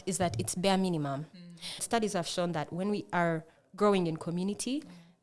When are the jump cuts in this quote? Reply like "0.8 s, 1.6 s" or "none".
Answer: 1.8 s

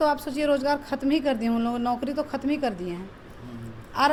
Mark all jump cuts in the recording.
none

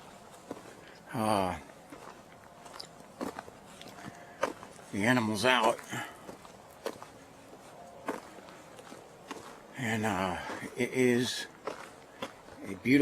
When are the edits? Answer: 10.7 s

